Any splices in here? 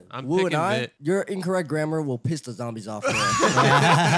yes; 1 cut; at 0.9 s

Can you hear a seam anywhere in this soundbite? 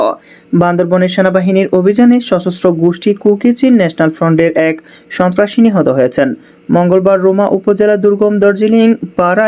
no; 0 cuts

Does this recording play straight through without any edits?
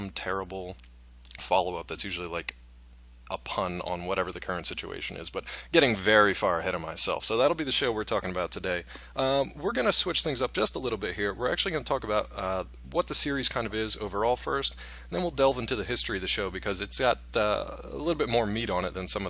no; 1 cut; at 15.8 s

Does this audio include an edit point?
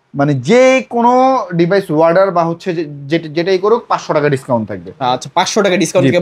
no; 0 cuts

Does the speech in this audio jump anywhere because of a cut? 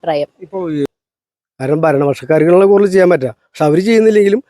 yes; 1 cut; at 0.9 s

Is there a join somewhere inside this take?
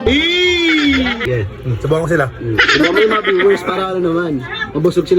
yes; 1 cut; at 1.2 s

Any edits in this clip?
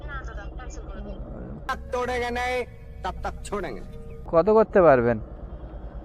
no; 0 cuts

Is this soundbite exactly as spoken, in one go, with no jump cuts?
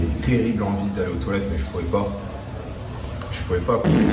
yes; 0 cuts

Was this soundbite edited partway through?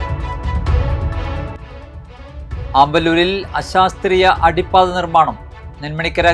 no; 0 cuts

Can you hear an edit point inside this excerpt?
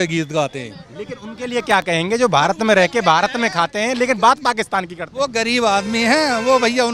no; 0 cuts

